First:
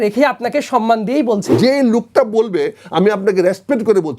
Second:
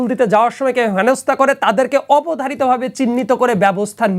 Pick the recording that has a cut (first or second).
first